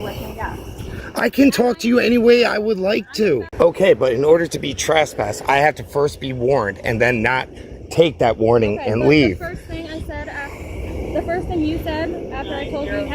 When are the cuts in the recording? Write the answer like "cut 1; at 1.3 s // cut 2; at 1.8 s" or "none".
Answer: cut 1; at 3.5 s